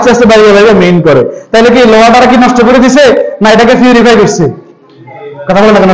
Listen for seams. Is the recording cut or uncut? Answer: uncut